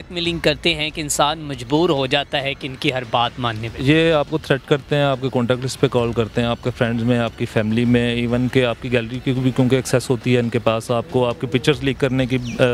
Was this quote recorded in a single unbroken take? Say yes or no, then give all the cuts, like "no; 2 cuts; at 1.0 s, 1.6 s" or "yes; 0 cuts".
yes; 0 cuts